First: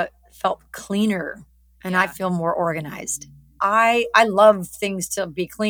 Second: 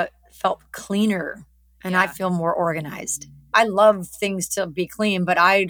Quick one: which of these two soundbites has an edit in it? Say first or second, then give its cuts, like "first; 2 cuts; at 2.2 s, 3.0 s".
second; 1 cut; at 3.5 s